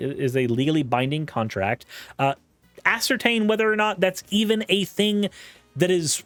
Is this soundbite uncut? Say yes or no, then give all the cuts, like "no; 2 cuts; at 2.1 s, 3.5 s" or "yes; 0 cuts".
yes; 0 cuts